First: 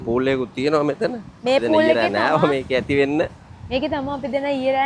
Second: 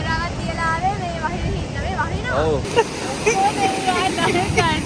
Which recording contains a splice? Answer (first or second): second